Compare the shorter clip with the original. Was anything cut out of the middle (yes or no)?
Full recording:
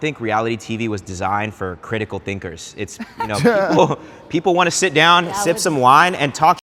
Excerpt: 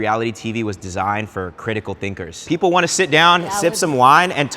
yes